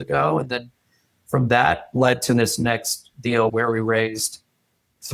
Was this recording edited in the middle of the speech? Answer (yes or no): yes